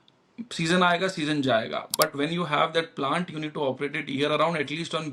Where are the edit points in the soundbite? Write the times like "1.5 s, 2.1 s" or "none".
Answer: none